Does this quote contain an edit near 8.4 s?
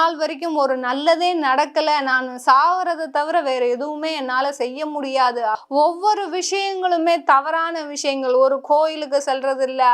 no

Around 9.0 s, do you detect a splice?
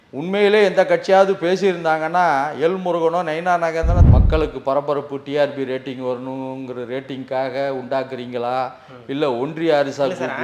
no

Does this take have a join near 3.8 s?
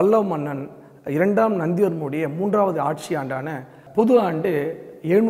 yes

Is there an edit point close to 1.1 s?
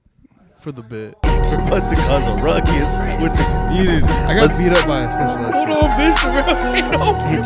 yes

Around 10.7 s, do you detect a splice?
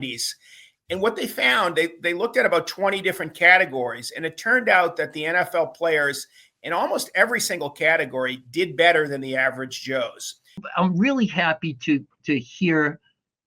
yes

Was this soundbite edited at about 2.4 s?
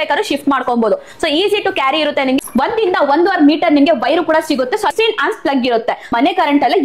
yes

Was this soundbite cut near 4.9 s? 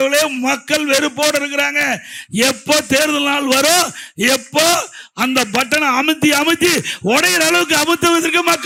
no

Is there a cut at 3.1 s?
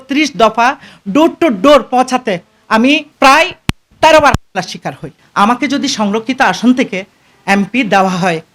yes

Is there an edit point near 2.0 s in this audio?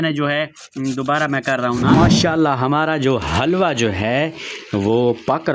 yes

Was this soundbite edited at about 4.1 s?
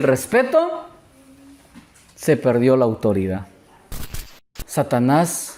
yes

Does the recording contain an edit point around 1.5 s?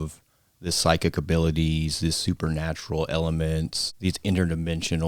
no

